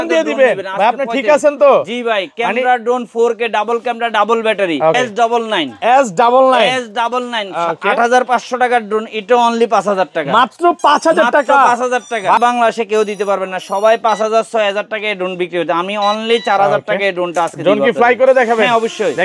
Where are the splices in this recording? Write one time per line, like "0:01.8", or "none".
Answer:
0:05.0
0:12.4